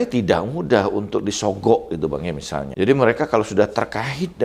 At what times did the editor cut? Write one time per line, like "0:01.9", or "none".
0:02.7